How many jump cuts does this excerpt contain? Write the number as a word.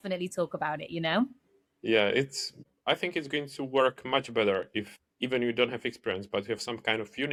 zero